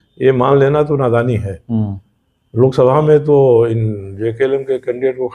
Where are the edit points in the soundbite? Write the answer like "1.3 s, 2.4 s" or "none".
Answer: none